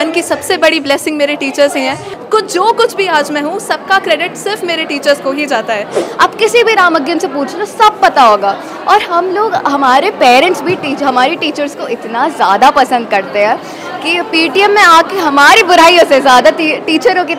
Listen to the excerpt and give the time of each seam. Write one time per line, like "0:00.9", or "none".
0:02.1
0:06.0